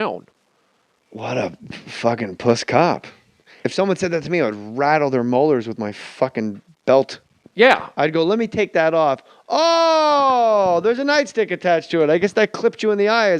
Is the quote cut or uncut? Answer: cut